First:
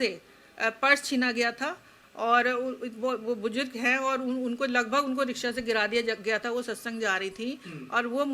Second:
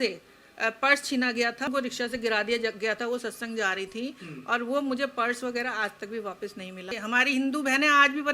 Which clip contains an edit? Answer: second; 2 cuts; at 1.7 s, 6.9 s

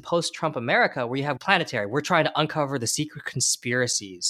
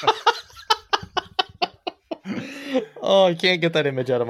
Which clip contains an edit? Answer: first; 1 cut; at 1.4 s

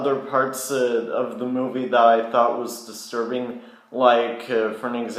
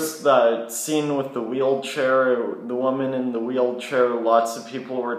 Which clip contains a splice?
second; 1 cut; at 2.4 s

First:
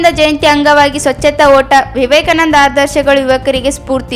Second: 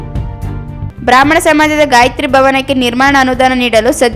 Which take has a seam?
second; 1 cut; at 0.9 s

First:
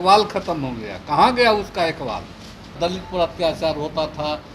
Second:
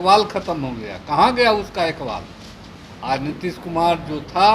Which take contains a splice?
first; 1 cut; at 2.8 s

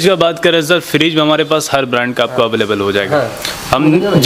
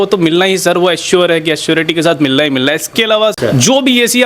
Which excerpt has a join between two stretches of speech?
second; 1 cut; at 3.3 s

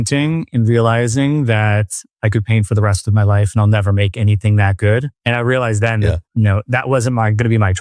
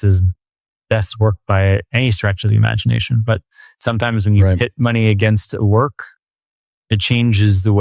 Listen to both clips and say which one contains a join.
first; 1 cut; at 5.1 s

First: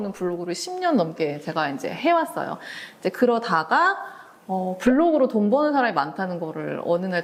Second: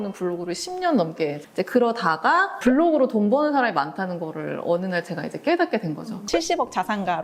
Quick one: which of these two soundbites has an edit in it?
second; 3 cuts; at 1.4 s, 2.6 s, 6.2 s

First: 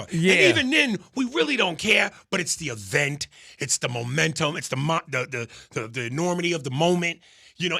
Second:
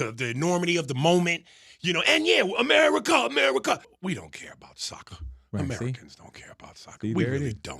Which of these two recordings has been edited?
second; 1 cut; at 3.9 s

